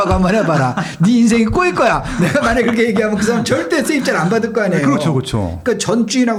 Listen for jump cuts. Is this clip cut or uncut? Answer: uncut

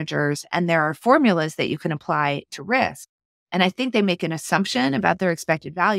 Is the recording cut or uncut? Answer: uncut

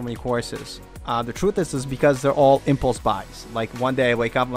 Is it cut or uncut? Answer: uncut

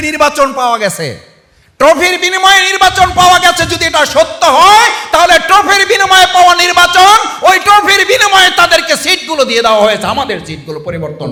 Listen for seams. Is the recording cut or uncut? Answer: uncut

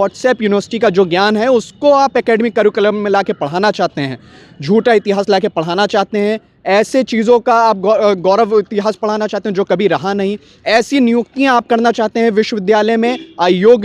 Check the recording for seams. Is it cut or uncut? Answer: uncut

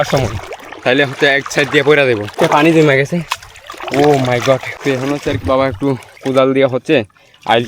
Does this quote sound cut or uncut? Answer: cut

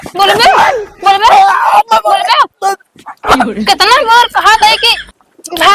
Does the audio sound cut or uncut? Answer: uncut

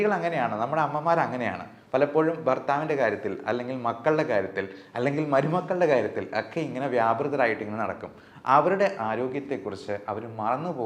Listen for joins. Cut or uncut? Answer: uncut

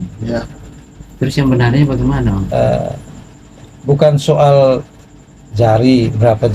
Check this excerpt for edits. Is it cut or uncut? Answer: cut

